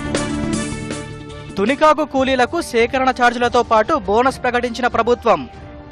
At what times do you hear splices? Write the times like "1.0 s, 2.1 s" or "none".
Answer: 1.1 s